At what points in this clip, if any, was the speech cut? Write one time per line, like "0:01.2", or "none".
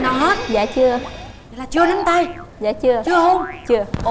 none